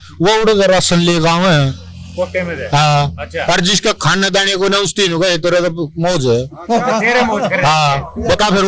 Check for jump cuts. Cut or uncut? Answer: uncut